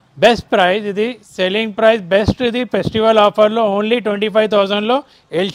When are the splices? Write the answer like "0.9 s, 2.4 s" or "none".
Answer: none